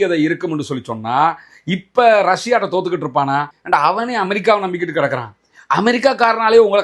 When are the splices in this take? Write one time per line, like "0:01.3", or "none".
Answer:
0:03.5